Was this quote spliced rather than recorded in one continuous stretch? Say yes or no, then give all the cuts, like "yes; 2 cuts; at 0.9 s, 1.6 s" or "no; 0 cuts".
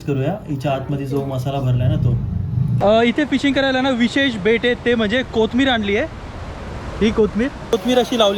yes; 2 cuts; at 2.7 s, 7.6 s